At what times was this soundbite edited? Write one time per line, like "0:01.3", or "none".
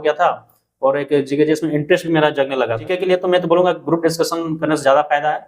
0:02.9